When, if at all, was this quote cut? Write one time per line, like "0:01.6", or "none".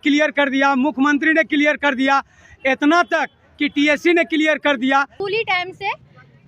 0:05.2